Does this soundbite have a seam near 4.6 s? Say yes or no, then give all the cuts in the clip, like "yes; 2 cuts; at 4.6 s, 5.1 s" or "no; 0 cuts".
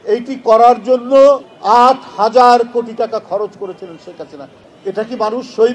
yes; 2 cuts; at 1.5 s, 4.6 s